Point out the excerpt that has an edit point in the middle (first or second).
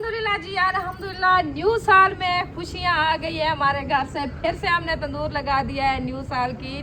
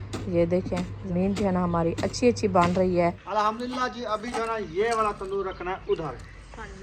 second